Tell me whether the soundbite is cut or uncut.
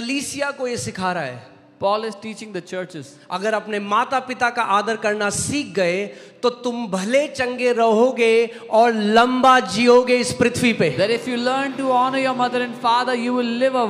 uncut